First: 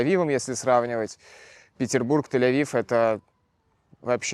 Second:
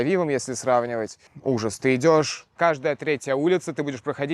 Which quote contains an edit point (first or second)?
second